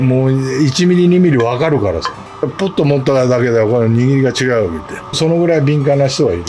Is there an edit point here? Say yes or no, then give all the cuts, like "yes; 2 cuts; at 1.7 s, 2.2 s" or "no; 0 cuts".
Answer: yes; 2 cuts; at 2.4 s, 5.2 s